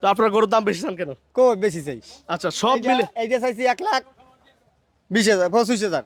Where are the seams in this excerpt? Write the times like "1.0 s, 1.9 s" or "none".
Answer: none